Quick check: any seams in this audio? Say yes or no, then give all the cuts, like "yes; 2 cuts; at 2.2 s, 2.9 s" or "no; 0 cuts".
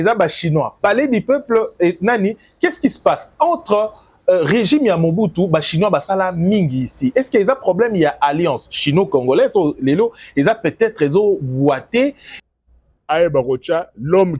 yes; 1 cut; at 12.3 s